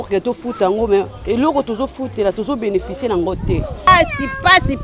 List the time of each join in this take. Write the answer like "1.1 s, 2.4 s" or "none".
3.9 s